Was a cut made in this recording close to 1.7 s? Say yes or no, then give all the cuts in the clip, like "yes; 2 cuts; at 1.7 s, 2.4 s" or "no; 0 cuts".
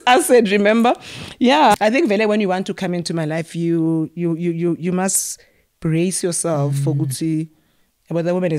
yes; 1 cut; at 1.7 s